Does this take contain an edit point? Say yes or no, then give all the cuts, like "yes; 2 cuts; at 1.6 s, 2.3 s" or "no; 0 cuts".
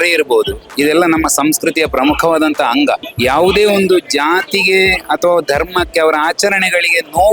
yes; 1 cut; at 3.1 s